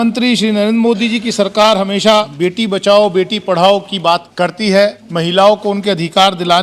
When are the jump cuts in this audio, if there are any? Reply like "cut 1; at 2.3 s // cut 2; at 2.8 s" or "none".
cut 1; at 2.3 s // cut 2; at 4.3 s // cut 3; at 5.0 s